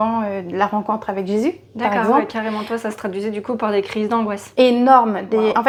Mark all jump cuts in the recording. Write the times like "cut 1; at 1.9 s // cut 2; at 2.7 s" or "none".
none